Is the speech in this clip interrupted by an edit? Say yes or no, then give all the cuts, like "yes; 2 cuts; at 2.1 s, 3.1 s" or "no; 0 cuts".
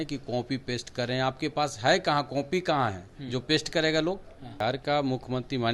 yes; 1 cut; at 4.6 s